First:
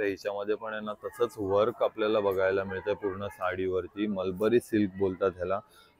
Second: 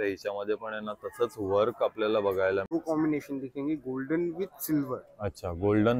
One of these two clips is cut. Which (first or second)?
second